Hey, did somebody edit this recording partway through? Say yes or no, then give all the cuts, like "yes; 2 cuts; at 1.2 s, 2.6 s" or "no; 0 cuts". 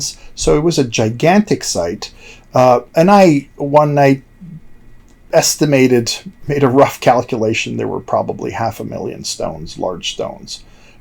no; 0 cuts